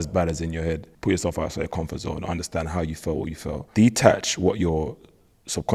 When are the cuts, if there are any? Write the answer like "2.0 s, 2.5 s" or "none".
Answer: 0.9 s, 1.8 s, 3.6 s